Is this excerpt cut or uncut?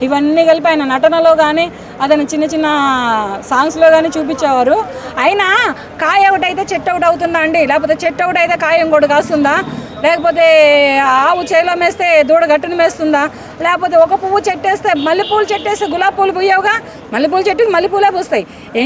uncut